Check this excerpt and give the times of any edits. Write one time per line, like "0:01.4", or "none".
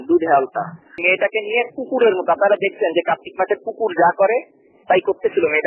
0:01.0